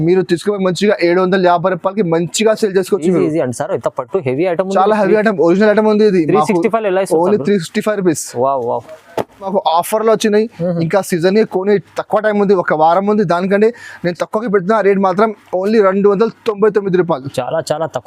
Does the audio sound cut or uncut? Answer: cut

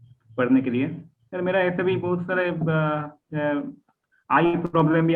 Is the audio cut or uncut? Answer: uncut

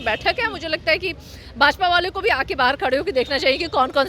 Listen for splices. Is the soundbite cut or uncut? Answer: uncut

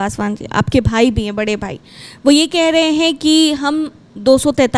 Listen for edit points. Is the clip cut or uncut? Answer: uncut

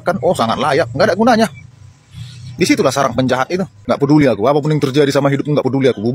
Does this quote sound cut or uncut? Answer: cut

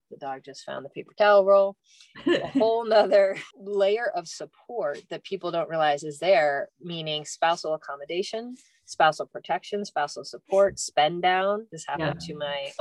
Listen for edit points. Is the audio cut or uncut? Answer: uncut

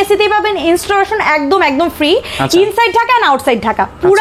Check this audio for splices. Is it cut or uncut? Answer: uncut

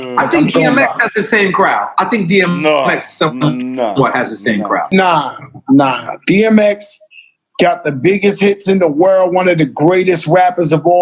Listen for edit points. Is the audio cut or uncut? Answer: cut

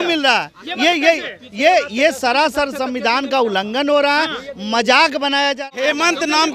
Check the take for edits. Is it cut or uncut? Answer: cut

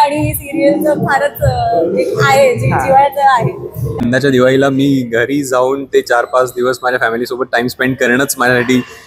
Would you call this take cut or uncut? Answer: cut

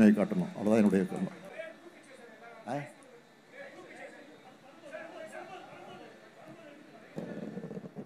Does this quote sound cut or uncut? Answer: cut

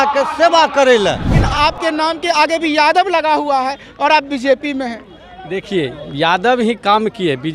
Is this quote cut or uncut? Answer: cut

